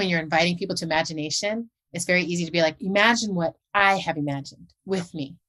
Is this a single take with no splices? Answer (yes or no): yes